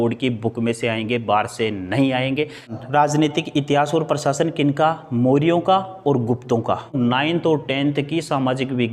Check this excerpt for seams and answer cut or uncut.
cut